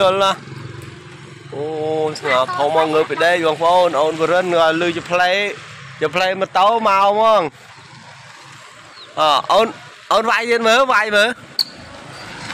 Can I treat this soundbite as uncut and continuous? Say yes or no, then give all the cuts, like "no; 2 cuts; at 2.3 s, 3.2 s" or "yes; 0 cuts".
yes; 0 cuts